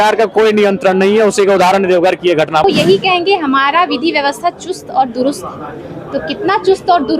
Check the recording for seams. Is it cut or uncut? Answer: cut